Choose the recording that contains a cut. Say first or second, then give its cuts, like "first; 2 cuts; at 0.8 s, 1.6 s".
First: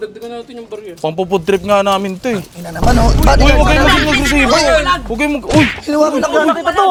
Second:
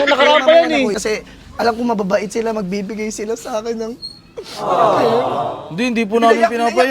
second; 1 cut; at 1.0 s